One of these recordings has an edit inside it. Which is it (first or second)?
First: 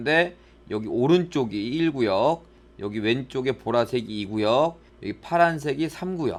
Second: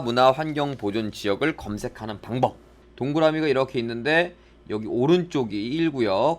second